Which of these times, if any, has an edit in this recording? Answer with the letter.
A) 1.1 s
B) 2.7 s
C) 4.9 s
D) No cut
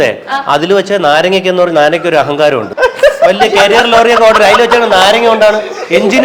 B